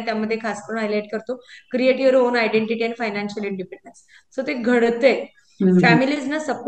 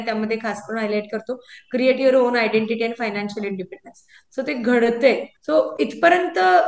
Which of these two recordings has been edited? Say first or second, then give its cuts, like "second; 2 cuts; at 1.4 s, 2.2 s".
second; 1 cut; at 5.3 s